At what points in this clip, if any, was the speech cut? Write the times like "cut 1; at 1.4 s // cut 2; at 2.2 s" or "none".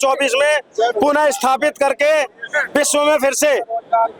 none

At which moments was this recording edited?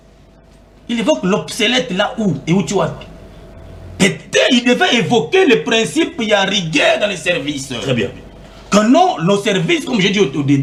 none

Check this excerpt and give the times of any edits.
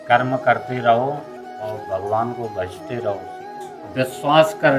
cut 1; at 3.4 s

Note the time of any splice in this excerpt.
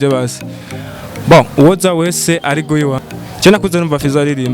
cut 1; at 3.0 s

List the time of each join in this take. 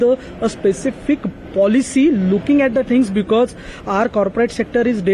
none

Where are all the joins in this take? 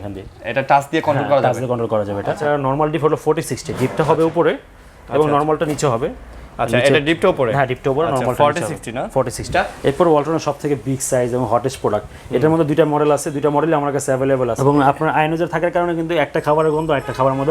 cut 1; at 2.4 s // cut 2; at 9.5 s // cut 3; at 14.6 s

